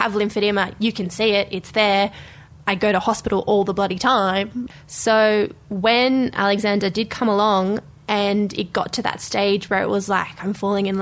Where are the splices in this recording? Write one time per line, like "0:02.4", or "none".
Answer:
0:04.6